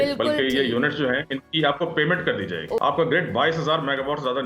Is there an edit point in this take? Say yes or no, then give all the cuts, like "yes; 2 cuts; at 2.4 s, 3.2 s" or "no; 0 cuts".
yes; 1 cut; at 2.8 s